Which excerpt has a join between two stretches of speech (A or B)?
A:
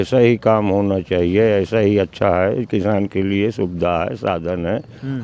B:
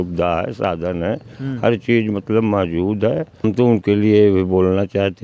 B